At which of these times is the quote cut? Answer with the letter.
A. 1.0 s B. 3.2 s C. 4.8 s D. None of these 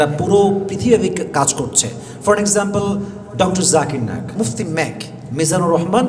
C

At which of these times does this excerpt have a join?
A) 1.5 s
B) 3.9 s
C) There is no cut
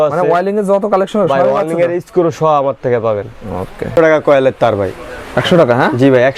C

